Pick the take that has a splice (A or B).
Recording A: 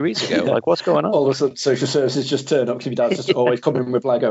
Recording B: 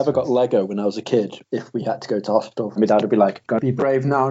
B